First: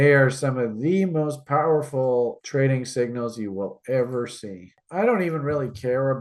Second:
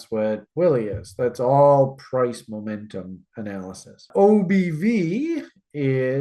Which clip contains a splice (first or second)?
first